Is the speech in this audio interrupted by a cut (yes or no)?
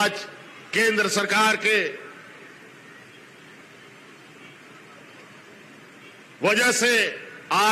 no